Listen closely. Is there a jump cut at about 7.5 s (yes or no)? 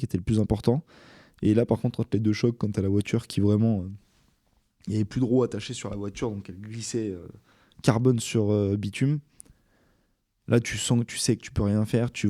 no